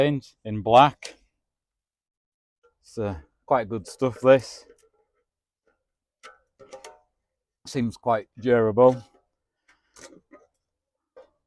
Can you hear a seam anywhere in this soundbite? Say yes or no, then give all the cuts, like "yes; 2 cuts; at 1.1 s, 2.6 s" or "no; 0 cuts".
no; 0 cuts